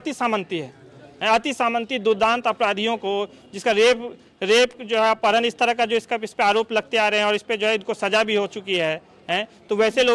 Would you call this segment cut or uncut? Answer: uncut